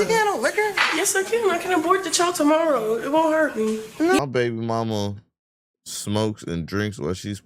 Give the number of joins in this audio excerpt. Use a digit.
1